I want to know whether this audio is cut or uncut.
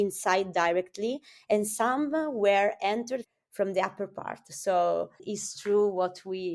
cut